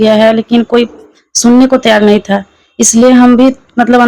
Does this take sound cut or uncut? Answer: uncut